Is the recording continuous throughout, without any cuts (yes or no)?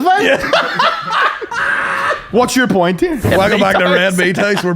no